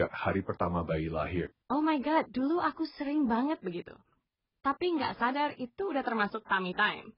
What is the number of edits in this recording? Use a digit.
1